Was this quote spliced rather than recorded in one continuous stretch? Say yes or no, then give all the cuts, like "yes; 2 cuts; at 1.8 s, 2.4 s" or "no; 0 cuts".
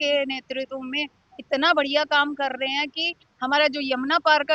no; 0 cuts